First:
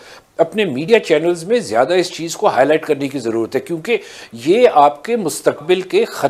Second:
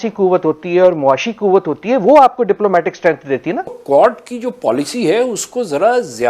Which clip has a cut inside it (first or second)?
second